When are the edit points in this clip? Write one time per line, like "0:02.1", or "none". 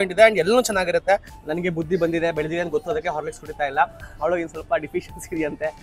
0:01.3